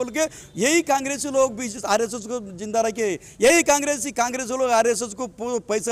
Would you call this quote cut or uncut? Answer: uncut